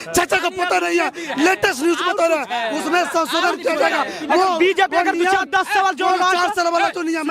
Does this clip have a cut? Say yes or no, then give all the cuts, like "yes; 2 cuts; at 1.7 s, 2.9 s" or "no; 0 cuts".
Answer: no; 0 cuts